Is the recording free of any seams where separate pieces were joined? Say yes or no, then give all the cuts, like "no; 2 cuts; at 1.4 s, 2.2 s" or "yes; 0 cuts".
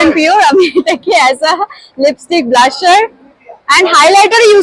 yes; 0 cuts